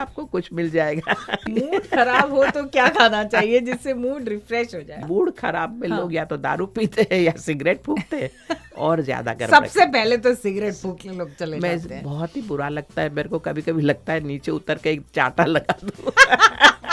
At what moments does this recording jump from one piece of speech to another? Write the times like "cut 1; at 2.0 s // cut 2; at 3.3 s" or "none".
cut 1; at 1.5 s // cut 2; at 5.0 s